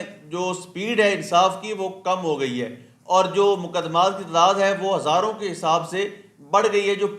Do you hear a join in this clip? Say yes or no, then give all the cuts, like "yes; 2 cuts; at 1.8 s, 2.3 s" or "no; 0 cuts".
no; 0 cuts